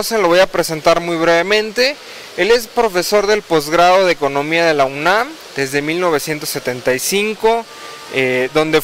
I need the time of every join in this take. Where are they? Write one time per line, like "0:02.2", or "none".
0:06.2